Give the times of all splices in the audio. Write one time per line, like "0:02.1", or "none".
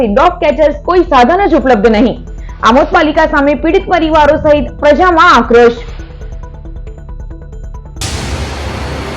0:07.9